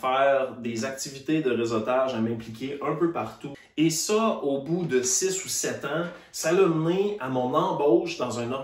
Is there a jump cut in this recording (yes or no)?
yes